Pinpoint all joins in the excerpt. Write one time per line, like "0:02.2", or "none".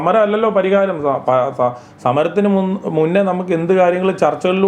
none